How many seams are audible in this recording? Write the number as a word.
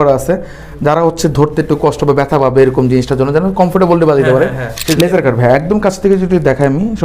one